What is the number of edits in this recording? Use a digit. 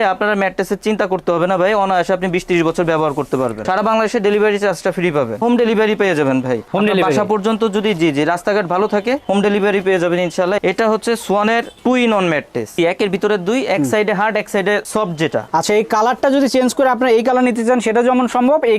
5